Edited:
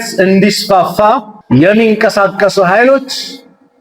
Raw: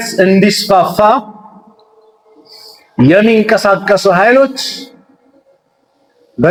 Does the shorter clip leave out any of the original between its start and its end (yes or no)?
yes